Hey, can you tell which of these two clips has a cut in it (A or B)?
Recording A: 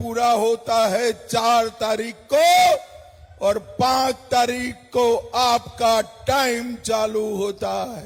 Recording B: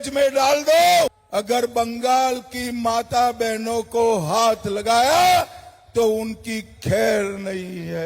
B